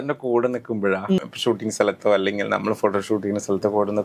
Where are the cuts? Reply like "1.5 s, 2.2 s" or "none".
1.2 s